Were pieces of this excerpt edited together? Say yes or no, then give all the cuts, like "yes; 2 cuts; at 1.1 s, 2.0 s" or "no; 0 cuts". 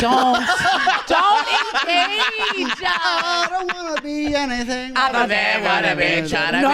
no; 0 cuts